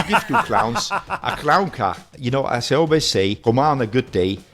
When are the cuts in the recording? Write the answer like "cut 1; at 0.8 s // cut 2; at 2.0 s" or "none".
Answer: cut 1; at 2.1 s // cut 2; at 3.4 s